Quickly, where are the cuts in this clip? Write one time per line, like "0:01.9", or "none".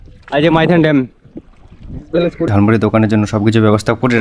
0:02.5